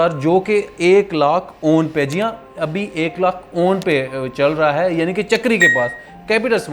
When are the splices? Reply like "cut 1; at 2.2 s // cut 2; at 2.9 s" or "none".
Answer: none